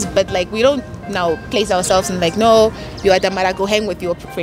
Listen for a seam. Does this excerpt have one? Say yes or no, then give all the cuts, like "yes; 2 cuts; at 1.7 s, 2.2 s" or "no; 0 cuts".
no; 0 cuts